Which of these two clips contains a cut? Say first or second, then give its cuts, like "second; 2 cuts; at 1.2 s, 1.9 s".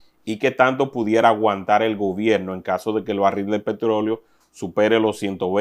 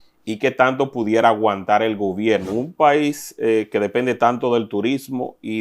second; 1 cut; at 2.5 s